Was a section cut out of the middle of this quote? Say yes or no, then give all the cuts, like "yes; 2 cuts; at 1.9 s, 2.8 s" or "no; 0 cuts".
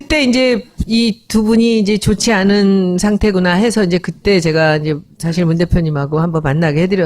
yes; 1 cut; at 2.7 s